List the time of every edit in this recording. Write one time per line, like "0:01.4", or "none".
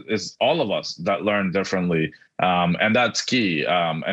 none